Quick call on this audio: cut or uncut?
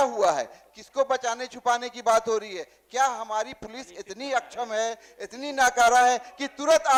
uncut